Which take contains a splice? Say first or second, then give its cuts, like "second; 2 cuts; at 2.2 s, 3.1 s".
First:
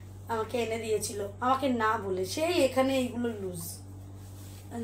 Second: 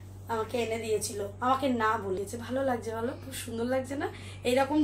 second; 1 cut; at 2.2 s